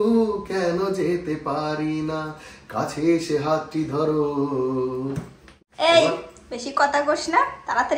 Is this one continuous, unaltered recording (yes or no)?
no